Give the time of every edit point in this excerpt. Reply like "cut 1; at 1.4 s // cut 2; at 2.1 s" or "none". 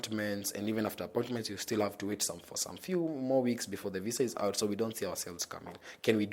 none